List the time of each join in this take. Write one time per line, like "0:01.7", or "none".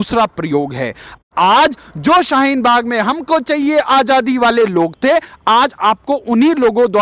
0:01.2